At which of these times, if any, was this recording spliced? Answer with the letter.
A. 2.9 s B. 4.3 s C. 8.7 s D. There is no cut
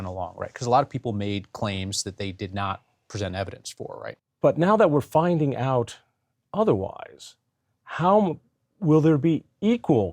B